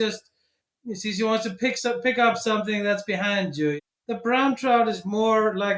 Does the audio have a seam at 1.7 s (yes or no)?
no